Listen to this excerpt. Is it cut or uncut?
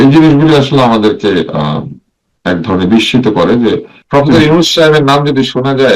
cut